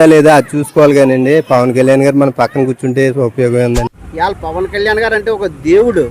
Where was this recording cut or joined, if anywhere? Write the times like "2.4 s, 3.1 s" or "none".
4.0 s